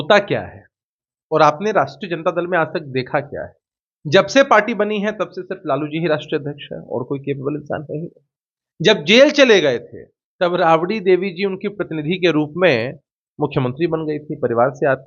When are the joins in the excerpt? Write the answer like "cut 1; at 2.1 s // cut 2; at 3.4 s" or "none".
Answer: none